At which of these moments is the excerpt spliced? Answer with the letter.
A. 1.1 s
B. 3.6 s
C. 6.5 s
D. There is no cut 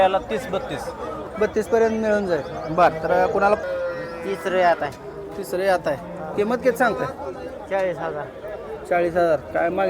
B